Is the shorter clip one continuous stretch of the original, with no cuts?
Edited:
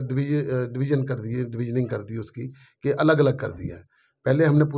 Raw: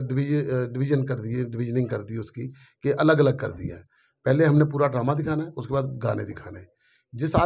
yes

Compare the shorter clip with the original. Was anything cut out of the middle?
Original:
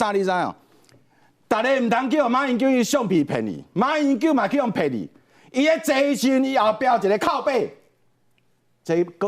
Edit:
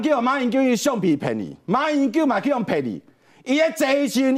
no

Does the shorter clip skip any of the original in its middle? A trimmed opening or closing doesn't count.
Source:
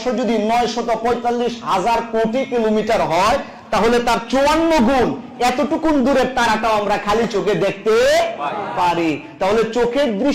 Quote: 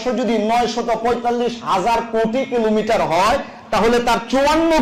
no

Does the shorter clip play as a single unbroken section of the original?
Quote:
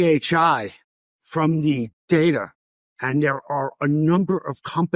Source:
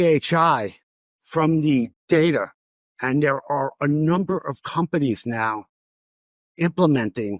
yes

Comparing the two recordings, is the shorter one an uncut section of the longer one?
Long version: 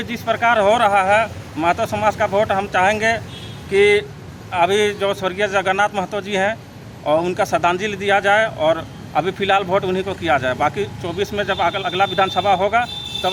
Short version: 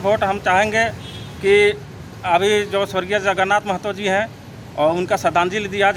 yes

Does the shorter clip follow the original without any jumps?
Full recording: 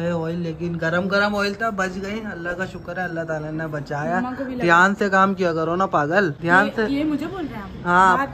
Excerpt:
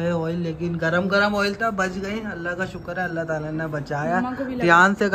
yes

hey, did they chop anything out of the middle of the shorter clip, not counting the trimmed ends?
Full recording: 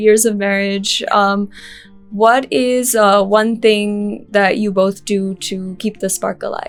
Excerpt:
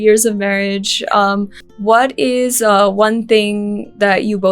yes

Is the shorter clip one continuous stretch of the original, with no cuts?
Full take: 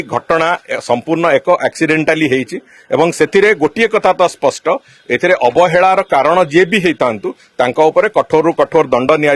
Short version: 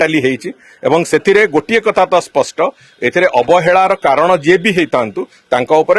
yes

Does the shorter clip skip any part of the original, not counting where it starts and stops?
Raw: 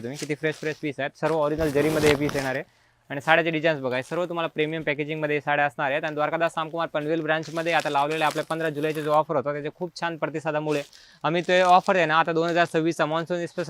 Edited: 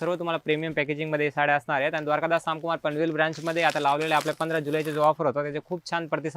no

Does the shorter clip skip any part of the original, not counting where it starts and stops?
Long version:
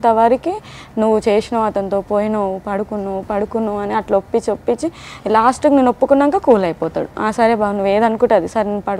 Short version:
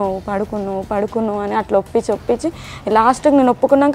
no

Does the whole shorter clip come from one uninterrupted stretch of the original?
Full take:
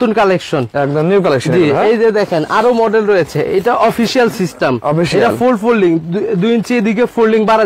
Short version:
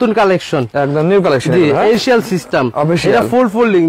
no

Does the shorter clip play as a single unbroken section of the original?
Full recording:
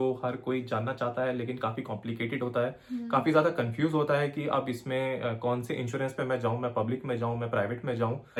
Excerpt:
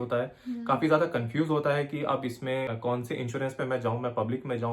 no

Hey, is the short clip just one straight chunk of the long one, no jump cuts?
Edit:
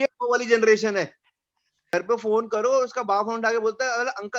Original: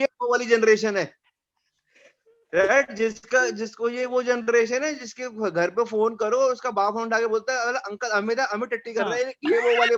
no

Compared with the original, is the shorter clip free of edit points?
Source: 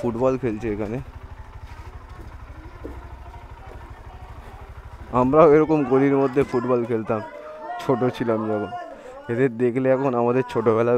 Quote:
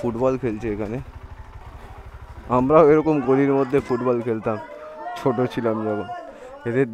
no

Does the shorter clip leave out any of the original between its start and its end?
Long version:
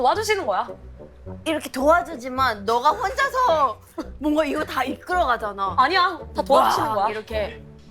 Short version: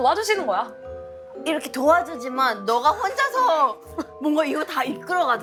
no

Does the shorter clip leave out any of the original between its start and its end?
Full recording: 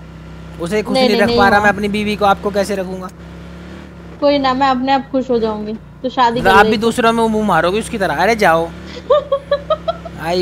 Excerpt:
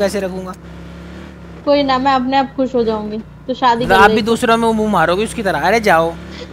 no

